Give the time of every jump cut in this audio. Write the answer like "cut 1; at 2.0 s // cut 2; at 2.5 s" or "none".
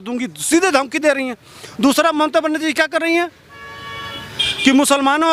none